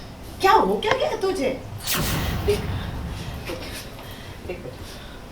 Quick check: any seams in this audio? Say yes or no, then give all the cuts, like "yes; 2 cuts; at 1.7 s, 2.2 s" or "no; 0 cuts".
no; 0 cuts